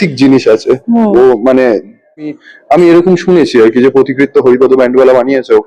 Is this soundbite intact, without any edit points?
no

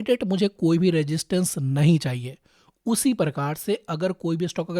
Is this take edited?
no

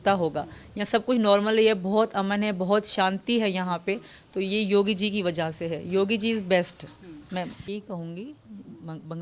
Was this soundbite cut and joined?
yes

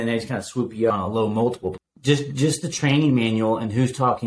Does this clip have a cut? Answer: yes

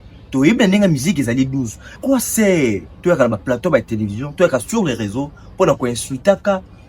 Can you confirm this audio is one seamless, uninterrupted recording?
no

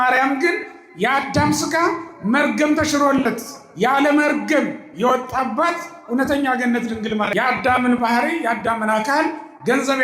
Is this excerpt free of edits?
no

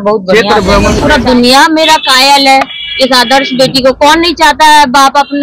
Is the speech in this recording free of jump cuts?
no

